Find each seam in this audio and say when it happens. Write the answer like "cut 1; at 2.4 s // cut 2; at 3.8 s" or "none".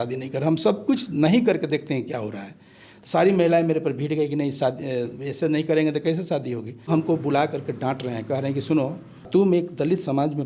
cut 1; at 6.9 s // cut 2; at 9.3 s